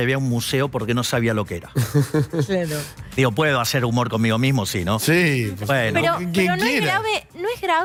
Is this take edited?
no; 0 cuts

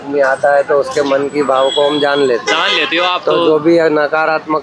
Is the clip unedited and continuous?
yes; 0 cuts

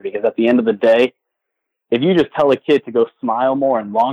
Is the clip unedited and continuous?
yes; 0 cuts

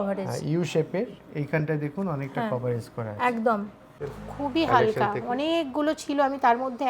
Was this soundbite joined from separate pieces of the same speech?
yes; 1 cut; at 3.9 s

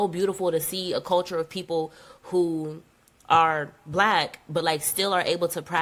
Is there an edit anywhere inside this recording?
no; 0 cuts

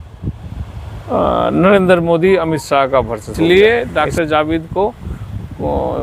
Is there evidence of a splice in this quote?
yes; 1 cut; at 3.2 s

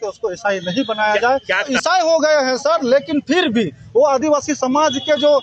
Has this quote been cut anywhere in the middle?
yes; 1 cut; at 1.7 s

